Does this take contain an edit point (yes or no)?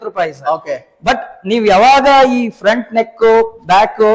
no